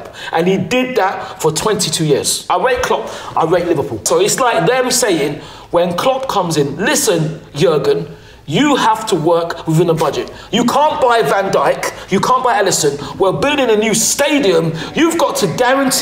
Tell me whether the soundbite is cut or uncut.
cut